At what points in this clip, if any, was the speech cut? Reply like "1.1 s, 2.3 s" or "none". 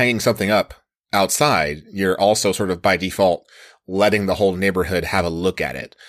none